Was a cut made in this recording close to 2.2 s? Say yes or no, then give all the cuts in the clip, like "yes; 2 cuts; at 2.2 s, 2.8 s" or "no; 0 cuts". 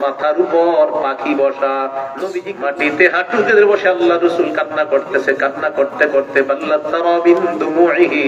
yes; 1 cut; at 2.2 s